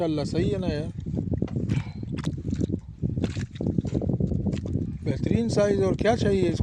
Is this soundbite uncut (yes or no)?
yes